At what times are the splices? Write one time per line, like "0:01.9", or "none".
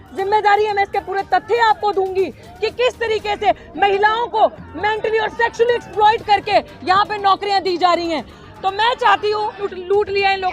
0:09.6